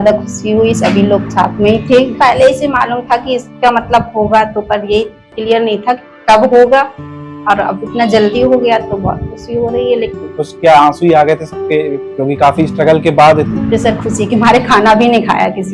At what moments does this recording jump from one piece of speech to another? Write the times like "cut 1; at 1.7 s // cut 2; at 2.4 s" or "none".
cut 1; at 2.1 s // cut 2; at 10.1 s // cut 3; at 12.1 s // cut 4; at 13.5 s